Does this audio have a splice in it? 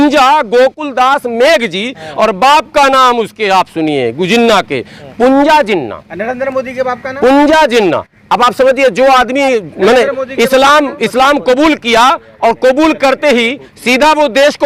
no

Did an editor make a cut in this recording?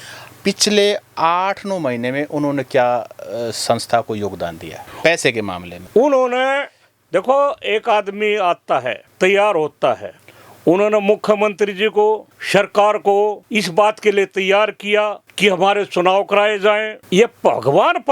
no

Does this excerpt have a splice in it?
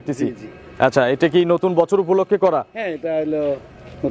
no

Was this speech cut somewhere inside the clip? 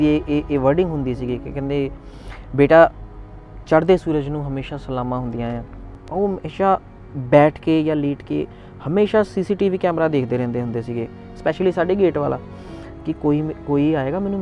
yes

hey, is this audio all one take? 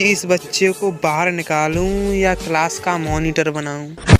yes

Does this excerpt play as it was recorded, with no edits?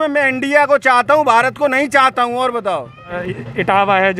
no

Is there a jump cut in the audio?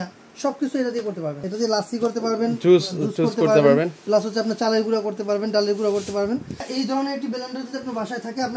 yes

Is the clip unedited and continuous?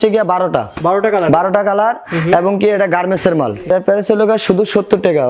no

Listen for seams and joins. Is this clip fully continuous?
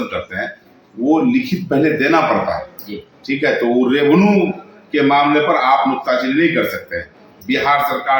yes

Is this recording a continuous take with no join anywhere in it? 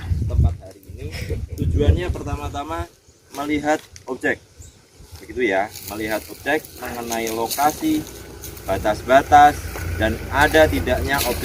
yes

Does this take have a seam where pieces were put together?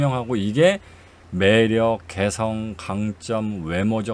no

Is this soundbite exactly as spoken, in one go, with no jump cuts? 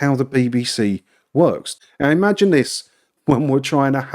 no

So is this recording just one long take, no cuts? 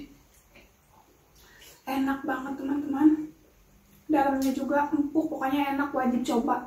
yes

